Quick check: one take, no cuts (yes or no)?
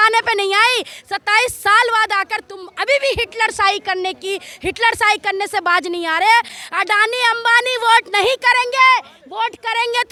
yes